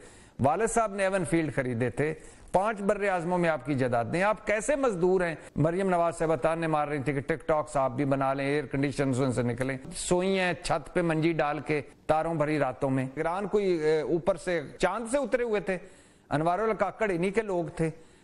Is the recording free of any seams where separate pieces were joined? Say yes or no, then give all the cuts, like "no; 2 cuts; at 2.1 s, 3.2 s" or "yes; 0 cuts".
no; 5 cuts; at 5.4 s, 9.9 s, 11.9 s, 13.2 s, 14.7 s